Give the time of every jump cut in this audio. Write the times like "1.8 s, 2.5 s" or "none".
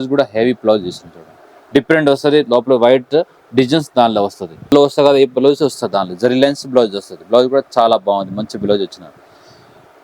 4.7 s